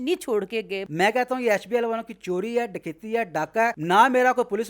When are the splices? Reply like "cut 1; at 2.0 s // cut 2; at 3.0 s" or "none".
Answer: cut 1; at 0.8 s // cut 2; at 3.8 s